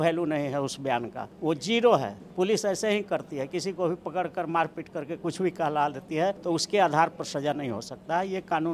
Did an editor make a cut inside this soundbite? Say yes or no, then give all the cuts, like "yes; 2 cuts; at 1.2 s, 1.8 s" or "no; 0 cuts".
yes; 3 cuts; at 1.2 s, 2.2 s, 6.4 s